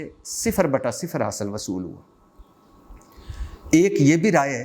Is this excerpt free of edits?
yes; 0 cuts

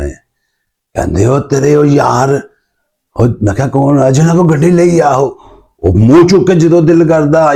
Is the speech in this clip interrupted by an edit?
no; 0 cuts

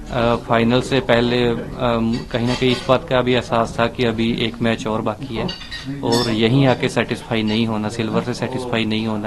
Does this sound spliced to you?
no; 0 cuts

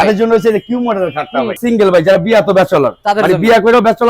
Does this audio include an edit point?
yes; 1 cut; at 1.6 s

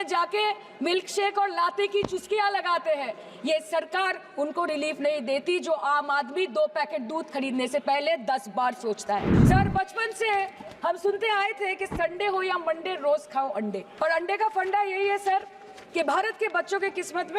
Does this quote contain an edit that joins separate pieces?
yes; 2 cuts; at 9.3 s, 13.8 s

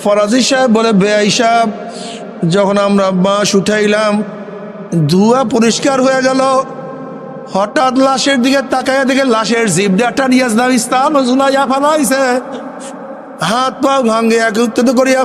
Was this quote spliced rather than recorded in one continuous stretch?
no; 0 cuts

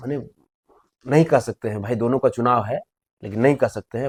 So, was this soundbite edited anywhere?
no; 0 cuts

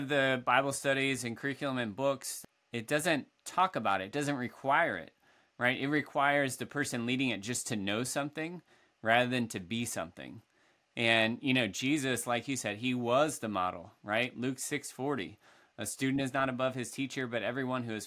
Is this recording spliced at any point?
yes; 1 cut; at 2.3 s

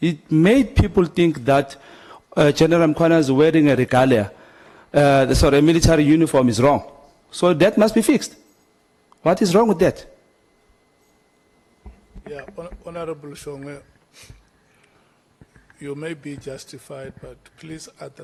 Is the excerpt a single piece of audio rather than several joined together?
yes; 0 cuts

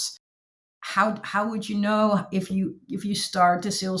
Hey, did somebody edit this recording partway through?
no; 0 cuts

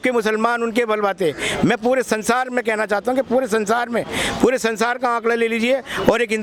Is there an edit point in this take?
no; 0 cuts

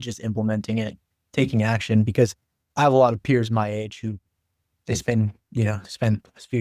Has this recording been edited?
no; 0 cuts

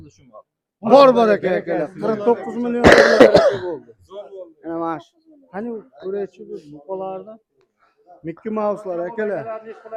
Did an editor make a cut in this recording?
no; 0 cuts

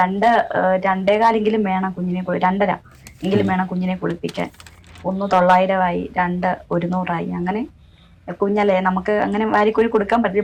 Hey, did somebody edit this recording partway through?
no; 0 cuts

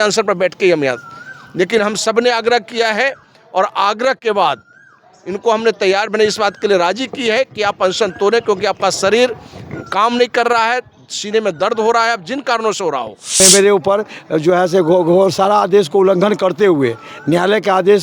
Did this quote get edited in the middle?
yes; 1 cut; at 13.4 s

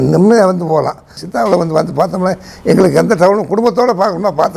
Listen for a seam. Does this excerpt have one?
yes; 1 cut; at 1.2 s

